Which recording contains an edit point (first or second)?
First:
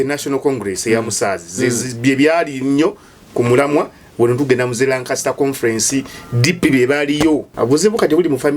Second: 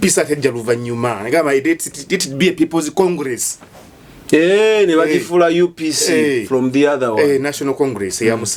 first